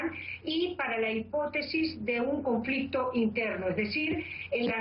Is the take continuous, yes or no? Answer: no